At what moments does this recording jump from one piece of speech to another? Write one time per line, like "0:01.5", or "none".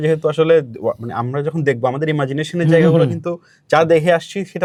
none